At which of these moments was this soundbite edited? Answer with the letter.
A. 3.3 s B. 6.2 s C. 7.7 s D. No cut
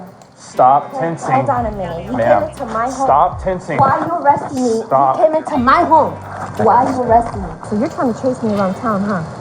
C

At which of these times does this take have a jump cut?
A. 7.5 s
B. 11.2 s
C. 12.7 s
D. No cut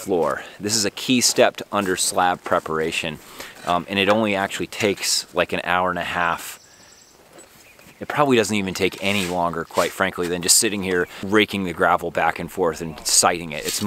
B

